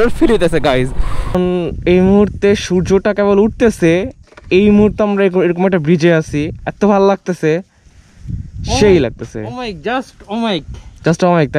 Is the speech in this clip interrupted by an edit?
yes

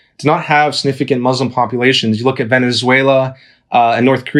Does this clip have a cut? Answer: no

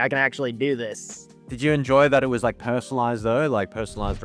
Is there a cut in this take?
no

